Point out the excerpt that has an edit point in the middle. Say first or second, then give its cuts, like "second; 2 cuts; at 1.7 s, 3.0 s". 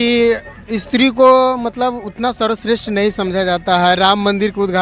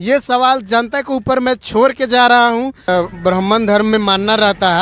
second; 1 cut; at 2.9 s